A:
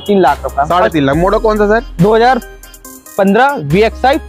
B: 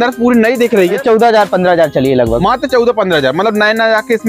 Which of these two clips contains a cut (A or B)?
B